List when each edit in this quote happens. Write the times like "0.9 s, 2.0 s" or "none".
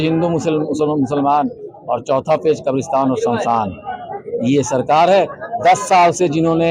none

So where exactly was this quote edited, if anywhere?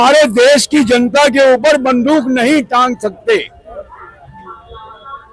none

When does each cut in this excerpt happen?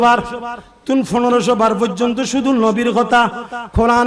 none

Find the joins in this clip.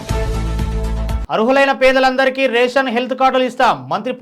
1.2 s

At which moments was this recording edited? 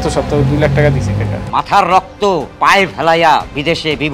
1.4 s, 2.5 s

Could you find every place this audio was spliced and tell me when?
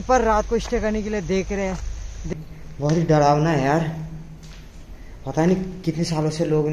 2.3 s

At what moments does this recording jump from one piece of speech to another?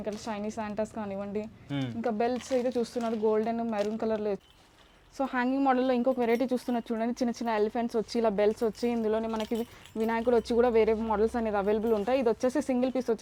4.5 s

